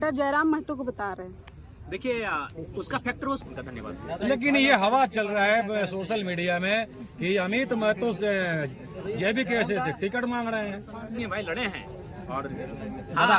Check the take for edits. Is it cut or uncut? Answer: cut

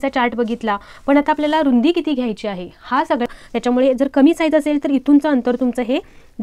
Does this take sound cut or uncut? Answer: cut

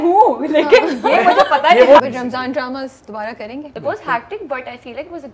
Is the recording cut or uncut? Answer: cut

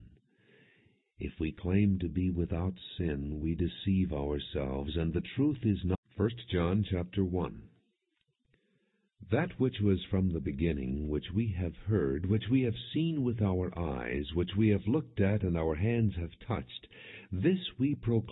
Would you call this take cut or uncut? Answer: uncut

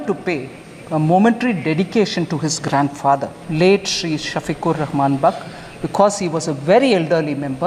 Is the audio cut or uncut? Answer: uncut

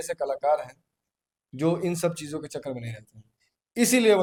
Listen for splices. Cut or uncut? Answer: uncut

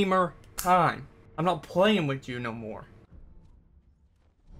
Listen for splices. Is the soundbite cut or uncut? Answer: cut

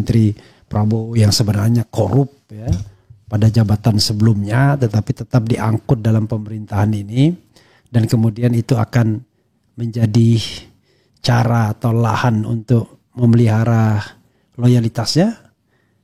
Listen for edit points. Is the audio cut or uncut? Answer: uncut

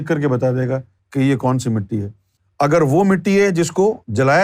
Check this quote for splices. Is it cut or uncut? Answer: cut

